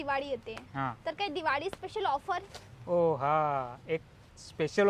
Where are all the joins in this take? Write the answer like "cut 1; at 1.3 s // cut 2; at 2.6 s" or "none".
none